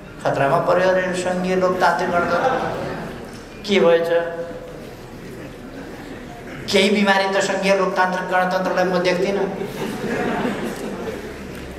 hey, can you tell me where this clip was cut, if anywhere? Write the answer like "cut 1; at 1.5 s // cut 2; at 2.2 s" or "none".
none